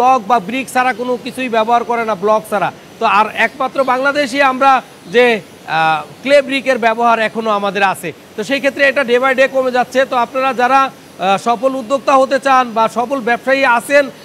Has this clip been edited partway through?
no; 0 cuts

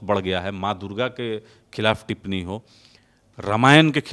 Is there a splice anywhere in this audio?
no; 0 cuts

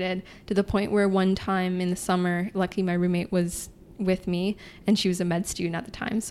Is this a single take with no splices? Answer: yes; 0 cuts

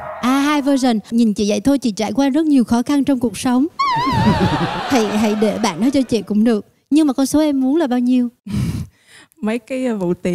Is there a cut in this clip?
yes; 1 cut; at 1.1 s

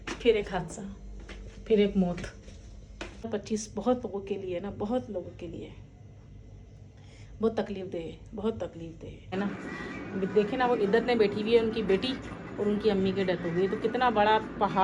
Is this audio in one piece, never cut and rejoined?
no; 2 cuts; at 3.3 s, 9.3 s

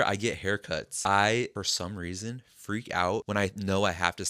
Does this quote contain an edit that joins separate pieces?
yes; 3 cuts; at 0.9 s, 1.5 s, 3.3 s

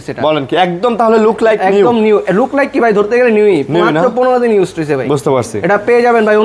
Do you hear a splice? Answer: no; 0 cuts

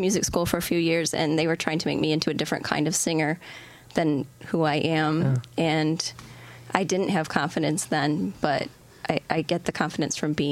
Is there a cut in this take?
no; 0 cuts

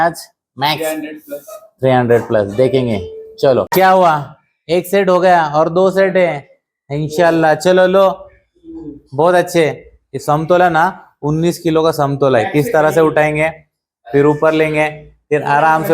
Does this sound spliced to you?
yes; 1 cut; at 3.7 s

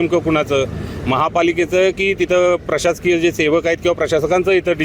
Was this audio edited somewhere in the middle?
no; 0 cuts

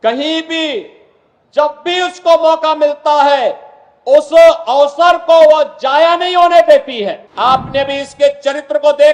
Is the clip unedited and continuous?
no; 1 cut; at 7.2 s

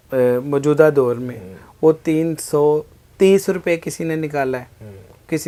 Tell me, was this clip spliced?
no; 0 cuts

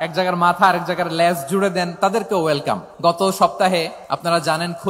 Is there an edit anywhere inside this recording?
yes; 2 cuts; at 2.9 s, 4.0 s

